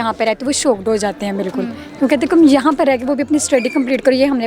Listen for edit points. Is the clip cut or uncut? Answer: uncut